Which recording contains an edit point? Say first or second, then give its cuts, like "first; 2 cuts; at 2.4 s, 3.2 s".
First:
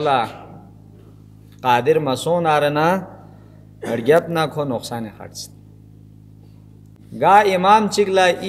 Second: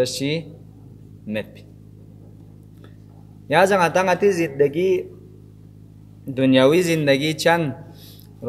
first; 1 cut; at 7.0 s